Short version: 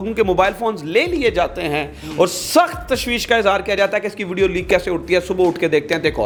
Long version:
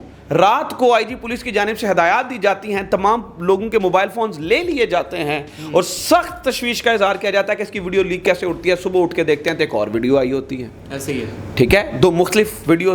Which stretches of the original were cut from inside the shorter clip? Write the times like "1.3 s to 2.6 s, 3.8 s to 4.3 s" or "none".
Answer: none